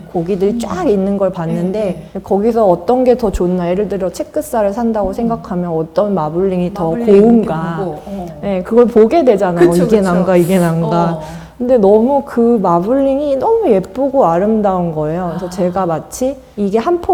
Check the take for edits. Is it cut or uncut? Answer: uncut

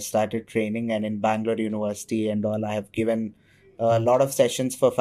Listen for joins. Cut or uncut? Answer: uncut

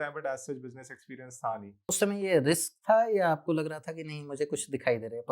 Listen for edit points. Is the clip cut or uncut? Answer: cut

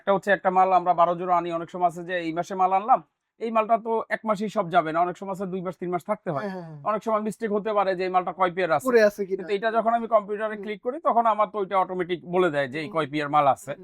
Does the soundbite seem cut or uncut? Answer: uncut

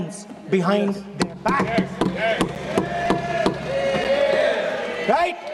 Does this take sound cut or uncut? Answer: uncut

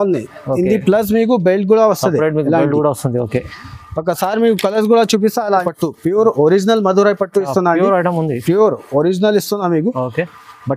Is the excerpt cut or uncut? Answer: cut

